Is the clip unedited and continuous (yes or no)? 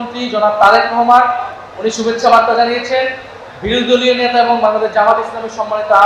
yes